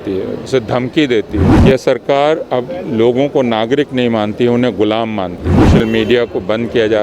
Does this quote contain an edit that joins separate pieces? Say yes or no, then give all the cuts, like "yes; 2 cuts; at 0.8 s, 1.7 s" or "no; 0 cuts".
yes; 2 cuts; at 1.5 s, 5.7 s